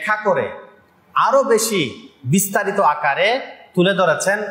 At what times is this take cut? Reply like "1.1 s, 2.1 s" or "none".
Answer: none